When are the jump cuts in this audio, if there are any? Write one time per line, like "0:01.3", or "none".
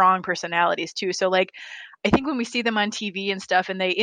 none

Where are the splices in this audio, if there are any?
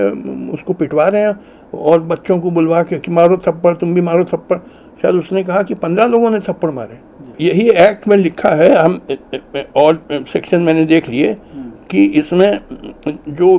none

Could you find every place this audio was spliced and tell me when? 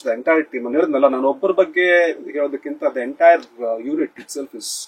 none

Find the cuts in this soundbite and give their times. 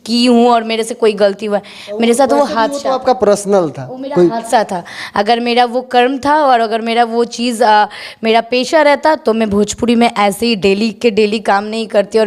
none

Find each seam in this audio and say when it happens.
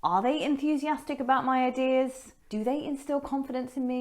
0:02.3

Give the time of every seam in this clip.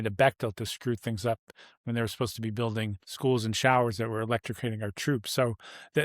0:03.0

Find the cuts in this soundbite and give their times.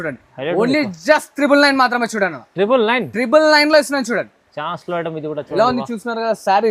none

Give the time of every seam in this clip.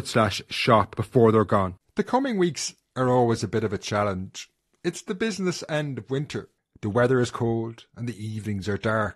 0:01.8

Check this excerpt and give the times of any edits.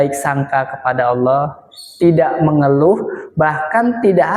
none

